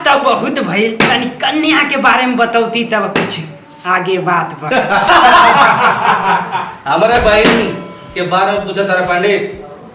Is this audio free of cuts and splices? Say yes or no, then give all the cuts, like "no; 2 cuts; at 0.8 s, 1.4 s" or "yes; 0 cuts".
no; 1 cut; at 5.1 s